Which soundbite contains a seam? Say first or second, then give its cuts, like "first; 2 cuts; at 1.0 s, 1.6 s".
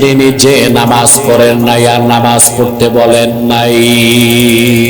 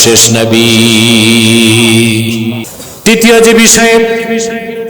second; 1 cut; at 2.7 s